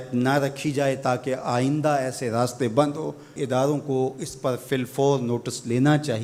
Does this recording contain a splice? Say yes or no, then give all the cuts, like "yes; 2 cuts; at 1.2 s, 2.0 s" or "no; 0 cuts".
no; 0 cuts